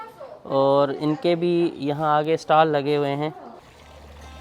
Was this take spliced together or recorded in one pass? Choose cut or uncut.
uncut